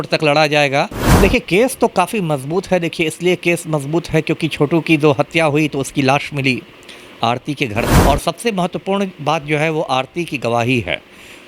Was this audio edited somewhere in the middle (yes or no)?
yes